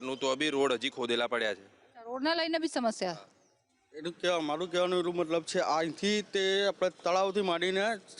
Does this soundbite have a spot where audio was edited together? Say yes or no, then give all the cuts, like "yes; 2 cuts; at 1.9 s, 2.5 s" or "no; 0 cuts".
no; 0 cuts